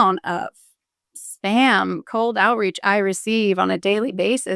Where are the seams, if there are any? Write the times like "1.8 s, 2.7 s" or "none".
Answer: none